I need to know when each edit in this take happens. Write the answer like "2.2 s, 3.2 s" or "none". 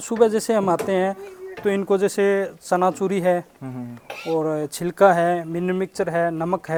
none